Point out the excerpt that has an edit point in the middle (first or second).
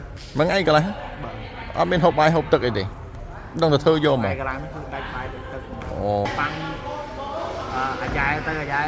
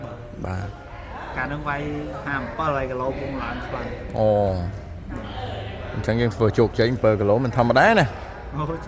first